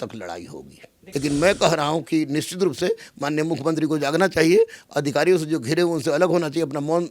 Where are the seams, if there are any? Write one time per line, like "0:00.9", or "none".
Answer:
0:01.0